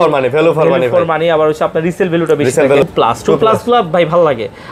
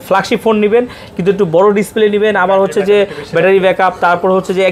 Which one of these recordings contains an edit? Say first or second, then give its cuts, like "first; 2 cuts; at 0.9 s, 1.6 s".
first; 1 cut; at 2.9 s